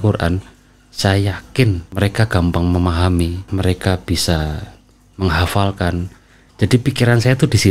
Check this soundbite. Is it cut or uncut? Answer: cut